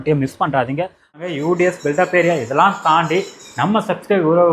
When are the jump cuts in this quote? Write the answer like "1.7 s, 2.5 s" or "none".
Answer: 1.1 s

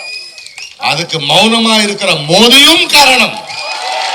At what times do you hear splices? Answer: none

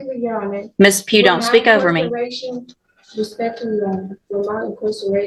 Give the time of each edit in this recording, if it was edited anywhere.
none

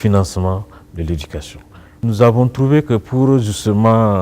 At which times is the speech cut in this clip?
2.0 s

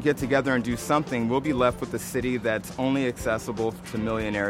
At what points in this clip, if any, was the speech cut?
none

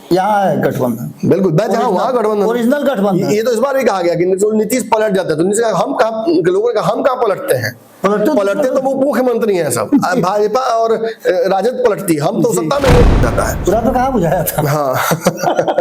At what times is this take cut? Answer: 13.1 s

